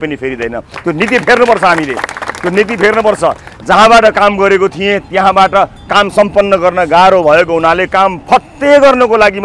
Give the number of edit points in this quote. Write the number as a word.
zero